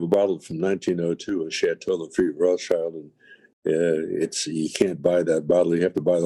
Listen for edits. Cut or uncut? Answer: uncut